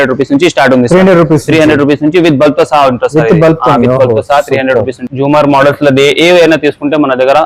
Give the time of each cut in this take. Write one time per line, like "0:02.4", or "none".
0:05.0